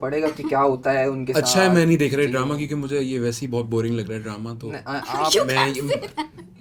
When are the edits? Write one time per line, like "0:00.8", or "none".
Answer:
none

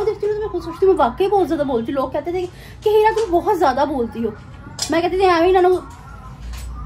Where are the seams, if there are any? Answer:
none

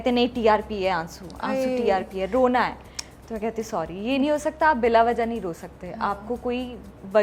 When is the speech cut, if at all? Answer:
none

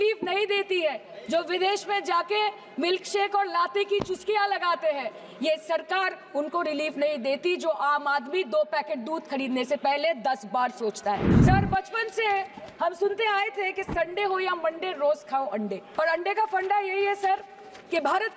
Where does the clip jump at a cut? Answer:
0:11.3
0:15.8

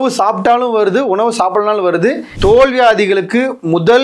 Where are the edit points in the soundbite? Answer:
0:02.3

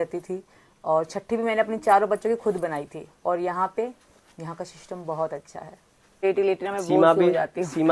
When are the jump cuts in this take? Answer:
0:06.2

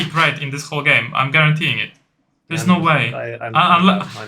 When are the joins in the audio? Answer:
none

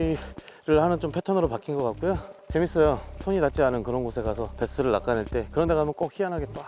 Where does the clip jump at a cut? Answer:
0:02.3
0:03.2
0:04.5

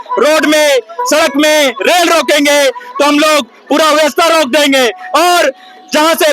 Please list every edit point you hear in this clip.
none

